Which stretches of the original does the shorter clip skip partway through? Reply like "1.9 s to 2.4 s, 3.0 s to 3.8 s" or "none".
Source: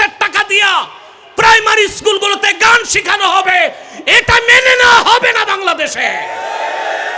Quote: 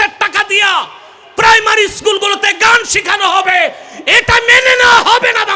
none